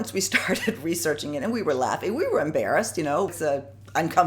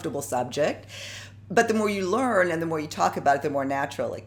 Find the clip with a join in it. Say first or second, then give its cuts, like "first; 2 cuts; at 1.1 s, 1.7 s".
first; 1 cut; at 3.3 s